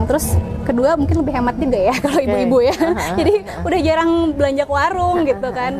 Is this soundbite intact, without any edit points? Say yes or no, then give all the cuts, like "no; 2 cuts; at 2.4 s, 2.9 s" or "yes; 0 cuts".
yes; 0 cuts